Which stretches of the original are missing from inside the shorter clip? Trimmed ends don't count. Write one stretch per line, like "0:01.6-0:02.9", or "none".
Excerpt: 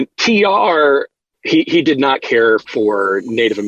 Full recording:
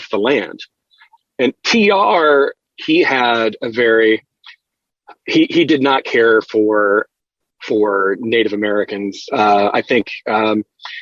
0:02.7-0:05.0
0:06.5-0:07.6

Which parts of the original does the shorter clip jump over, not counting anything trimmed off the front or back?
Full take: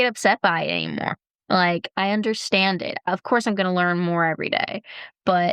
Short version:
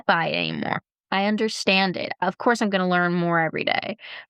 0:01.4-0:01.9

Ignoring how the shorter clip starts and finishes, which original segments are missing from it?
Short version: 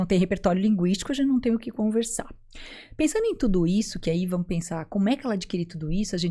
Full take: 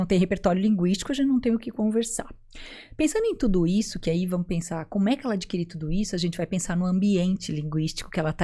none

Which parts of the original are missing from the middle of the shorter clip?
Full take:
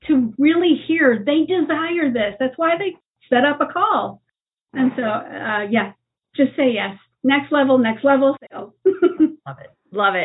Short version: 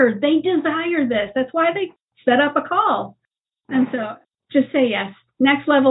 0:05.3-0:06.1

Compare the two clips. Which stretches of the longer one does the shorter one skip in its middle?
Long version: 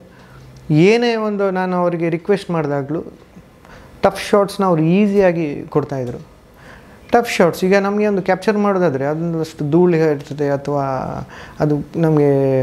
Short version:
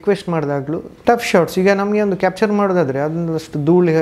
0:03.1-0:07.0

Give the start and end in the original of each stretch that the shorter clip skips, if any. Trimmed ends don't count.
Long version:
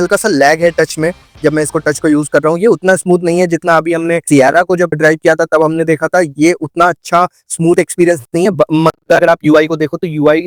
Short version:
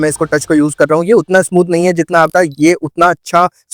0:03.8-0:06.1

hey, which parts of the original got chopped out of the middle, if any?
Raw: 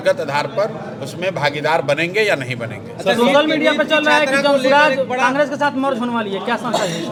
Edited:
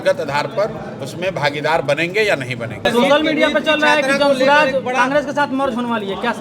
0:02.8-0:03.0

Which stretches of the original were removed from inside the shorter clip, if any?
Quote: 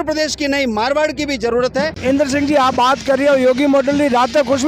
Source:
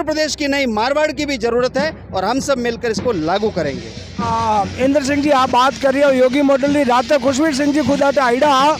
0:02.0-0:04.7

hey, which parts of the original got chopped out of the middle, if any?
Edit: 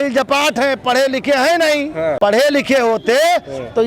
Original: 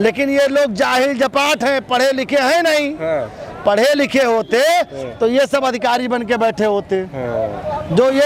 0:03.2-0:03.6

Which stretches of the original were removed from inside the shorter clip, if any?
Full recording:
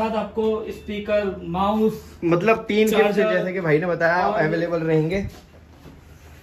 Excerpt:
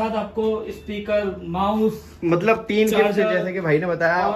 none

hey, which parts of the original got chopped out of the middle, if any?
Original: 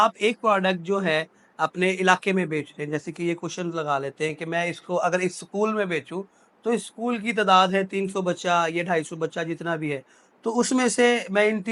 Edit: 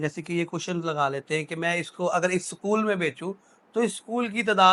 none

